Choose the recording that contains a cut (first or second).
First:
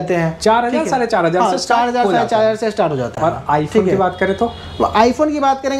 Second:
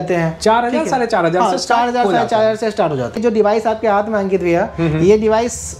second